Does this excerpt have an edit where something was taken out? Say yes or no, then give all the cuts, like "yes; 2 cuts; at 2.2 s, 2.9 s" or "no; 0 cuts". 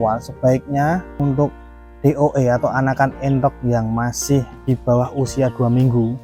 yes; 2 cuts; at 1.1 s, 4.5 s